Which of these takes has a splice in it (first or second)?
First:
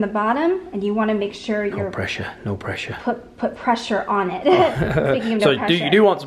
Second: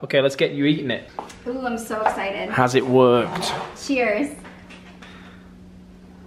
second